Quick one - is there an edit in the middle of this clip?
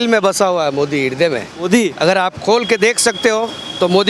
no; 0 cuts

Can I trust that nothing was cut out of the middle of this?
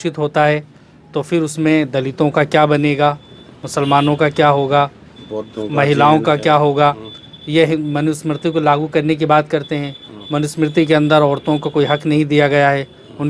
yes; 0 cuts

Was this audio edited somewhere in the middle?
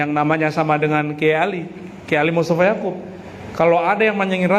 no; 0 cuts

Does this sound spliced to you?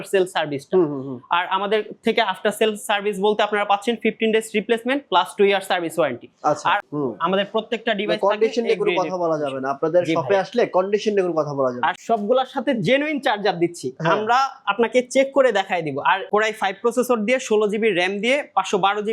yes; 3 cuts; at 6.9 s, 12.0 s, 16.3 s

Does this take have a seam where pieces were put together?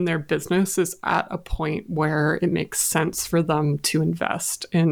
no; 0 cuts

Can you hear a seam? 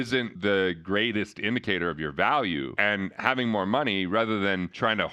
no; 0 cuts

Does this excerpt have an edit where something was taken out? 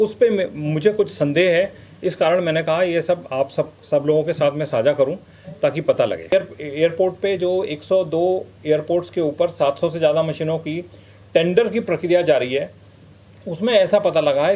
yes; 1 cut; at 6.3 s

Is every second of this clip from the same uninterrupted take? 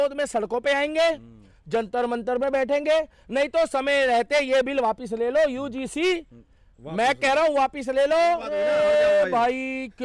no; 1 cut; at 8.5 s

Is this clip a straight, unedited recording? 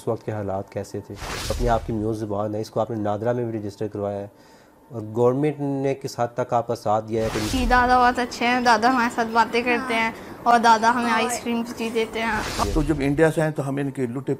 no; 3 cuts; at 1.6 s, 7.5 s, 12.6 s

